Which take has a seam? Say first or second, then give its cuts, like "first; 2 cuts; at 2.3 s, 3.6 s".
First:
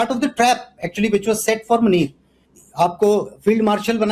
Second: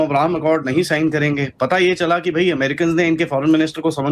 first; 1 cut; at 2.6 s